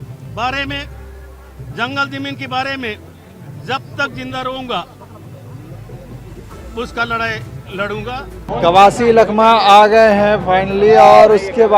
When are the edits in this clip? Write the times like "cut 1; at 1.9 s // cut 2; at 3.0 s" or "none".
cut 1; at 8.3 s